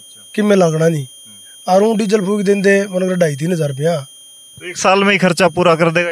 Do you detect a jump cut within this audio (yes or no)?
no